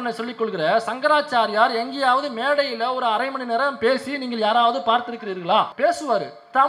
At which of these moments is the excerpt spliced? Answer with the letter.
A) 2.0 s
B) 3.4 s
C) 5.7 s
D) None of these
C